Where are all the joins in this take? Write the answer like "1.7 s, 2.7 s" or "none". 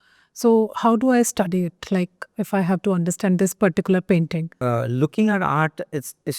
4.5 s